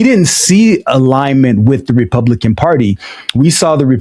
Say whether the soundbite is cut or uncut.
uncut